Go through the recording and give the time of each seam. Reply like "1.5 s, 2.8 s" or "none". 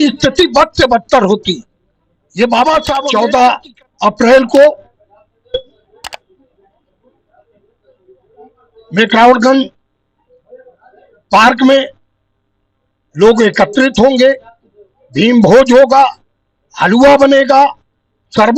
3.0 s